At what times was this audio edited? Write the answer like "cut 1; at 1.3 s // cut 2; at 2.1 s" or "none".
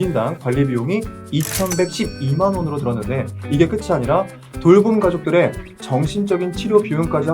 none